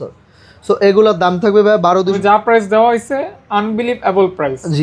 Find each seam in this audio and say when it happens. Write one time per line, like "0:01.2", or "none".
0:02.2